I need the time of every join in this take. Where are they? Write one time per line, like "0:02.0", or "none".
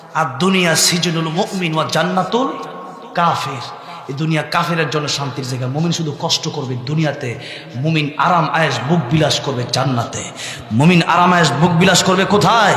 none